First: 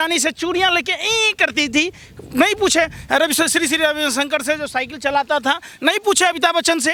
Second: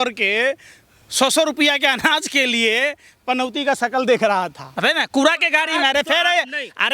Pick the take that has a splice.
second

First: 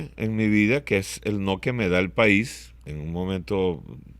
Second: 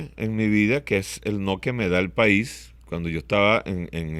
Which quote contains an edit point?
first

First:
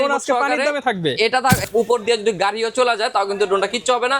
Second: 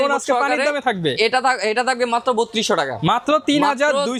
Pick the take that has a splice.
first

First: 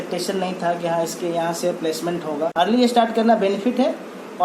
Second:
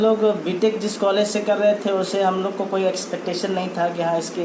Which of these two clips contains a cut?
first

